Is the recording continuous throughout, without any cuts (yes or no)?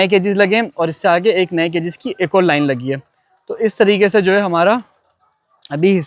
yes